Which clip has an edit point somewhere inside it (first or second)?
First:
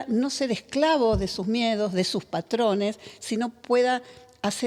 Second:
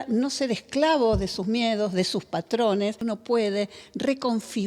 second